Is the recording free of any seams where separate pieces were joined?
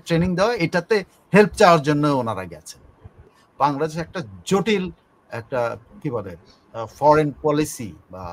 no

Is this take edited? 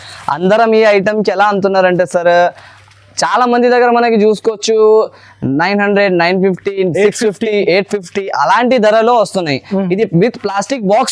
no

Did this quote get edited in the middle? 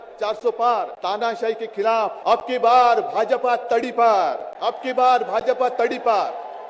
yes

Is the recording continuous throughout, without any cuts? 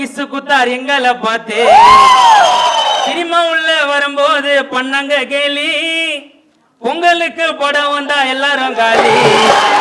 no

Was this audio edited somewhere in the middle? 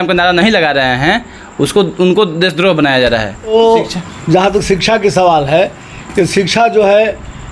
yes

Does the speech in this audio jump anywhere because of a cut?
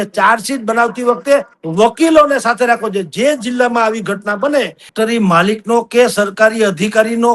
yes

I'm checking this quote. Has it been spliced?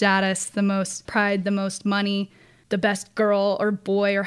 yes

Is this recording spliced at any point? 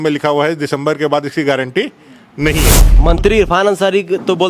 yes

